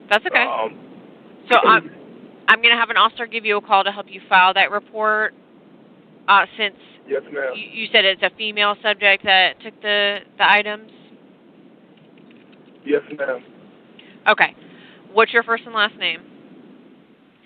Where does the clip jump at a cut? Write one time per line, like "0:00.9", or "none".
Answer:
none